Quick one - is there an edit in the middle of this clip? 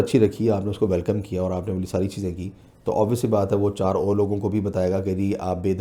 no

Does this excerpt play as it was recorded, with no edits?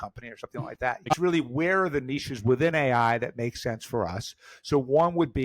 no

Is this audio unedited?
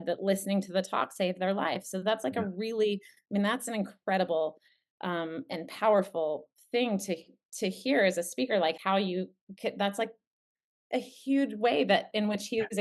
yes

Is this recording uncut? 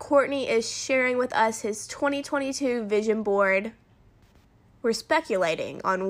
yes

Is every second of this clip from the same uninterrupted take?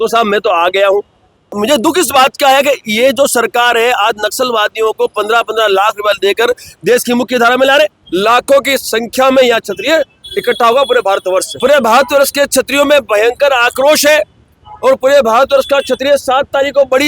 no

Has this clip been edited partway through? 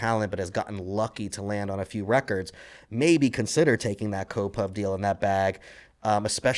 no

